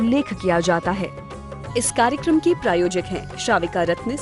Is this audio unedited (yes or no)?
no